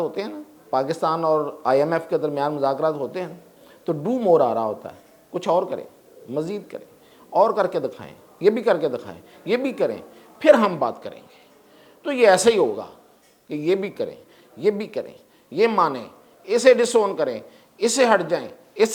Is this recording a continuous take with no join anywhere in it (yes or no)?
yes